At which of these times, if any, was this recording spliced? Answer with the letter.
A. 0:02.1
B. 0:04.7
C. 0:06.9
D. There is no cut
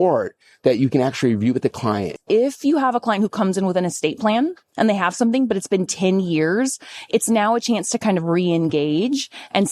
A